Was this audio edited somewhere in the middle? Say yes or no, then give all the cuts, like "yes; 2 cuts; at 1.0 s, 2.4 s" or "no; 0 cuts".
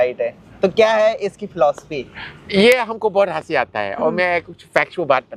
no; 0 cuts